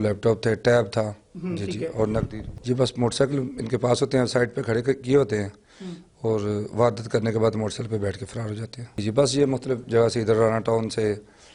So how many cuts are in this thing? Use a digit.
3